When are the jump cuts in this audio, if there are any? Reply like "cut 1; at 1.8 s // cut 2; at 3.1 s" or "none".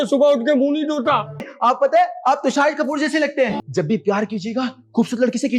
cut 1; at 1.5 s // cut 2; at 3.6 s